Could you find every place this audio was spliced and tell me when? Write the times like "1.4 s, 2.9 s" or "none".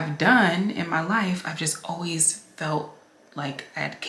none